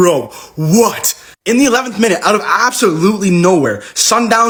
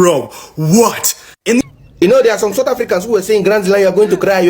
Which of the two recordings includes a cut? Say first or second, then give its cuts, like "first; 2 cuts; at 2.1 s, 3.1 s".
second; 1 cut; at 1.6 s